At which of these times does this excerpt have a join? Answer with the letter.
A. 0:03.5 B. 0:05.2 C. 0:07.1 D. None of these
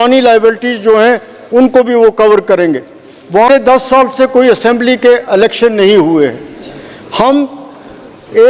A